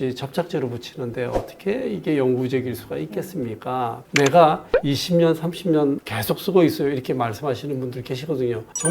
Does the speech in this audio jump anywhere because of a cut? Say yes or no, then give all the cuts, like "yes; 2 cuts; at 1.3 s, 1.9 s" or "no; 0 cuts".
yes; 1 cut; at 4.0 s